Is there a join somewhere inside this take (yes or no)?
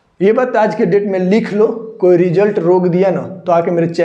no